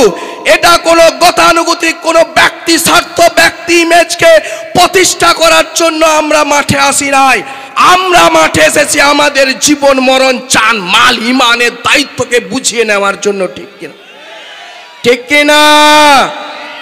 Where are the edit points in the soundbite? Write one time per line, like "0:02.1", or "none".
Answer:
none